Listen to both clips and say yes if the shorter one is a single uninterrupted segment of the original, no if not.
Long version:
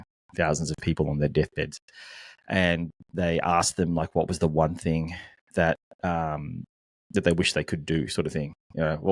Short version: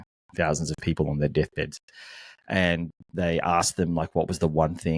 yes